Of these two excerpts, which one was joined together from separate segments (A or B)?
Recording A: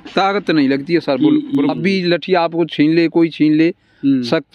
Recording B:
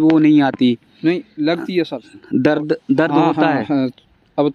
A